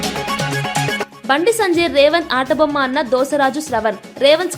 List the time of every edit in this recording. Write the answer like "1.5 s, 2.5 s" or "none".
none